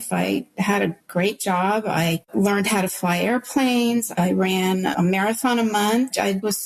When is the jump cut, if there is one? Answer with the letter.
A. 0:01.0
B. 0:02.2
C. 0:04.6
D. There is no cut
B